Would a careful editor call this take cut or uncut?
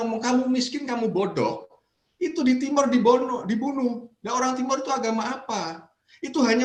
uncut